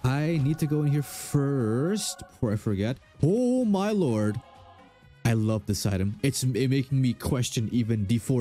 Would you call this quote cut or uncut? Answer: uncut